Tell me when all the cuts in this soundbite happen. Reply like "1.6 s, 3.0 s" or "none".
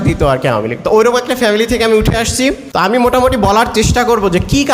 2.6 s